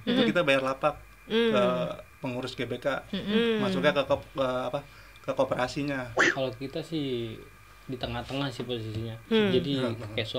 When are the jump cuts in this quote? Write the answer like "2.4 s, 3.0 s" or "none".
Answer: 6.2 s